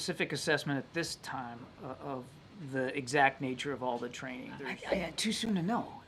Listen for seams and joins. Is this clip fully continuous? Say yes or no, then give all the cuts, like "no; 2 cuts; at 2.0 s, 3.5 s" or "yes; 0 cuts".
no; 1 cut; at 4.7 s